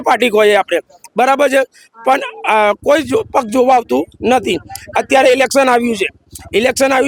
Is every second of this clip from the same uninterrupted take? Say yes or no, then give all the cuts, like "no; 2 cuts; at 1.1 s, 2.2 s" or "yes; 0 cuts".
yes; 0 cuts